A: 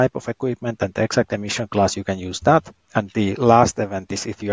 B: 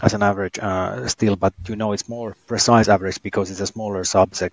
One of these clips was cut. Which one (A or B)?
A